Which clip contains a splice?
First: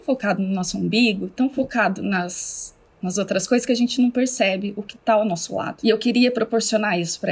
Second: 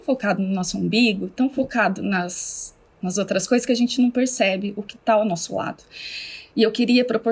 first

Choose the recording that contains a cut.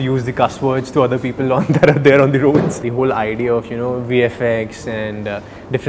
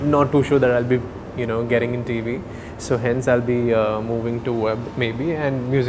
first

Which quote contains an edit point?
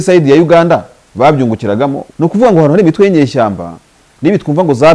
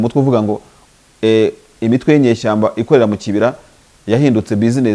first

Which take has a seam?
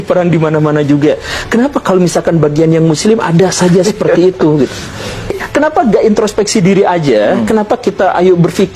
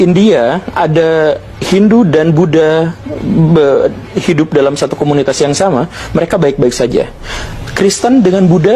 first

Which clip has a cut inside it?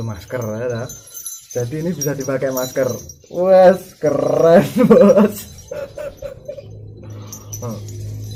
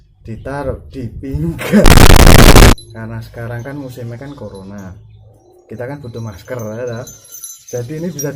second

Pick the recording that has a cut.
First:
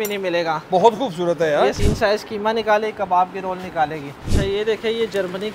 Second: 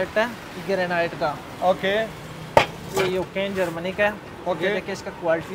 first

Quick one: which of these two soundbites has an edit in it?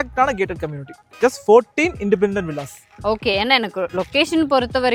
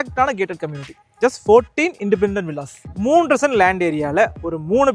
second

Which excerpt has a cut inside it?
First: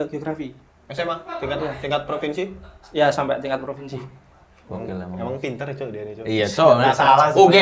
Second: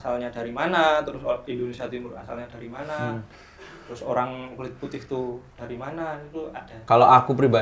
second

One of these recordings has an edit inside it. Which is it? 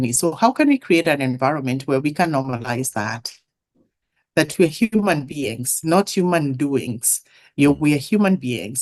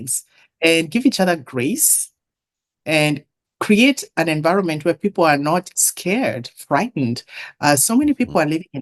second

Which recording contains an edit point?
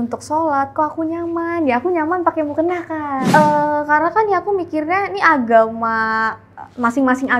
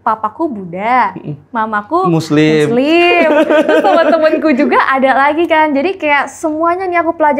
first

